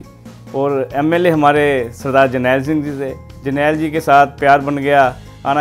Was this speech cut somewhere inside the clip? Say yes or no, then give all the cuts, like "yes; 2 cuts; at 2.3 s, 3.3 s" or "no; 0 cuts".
yes; 1 cut; at 3.3 s